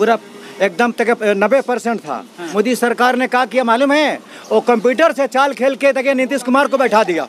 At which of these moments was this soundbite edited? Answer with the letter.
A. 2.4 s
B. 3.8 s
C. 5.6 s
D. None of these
A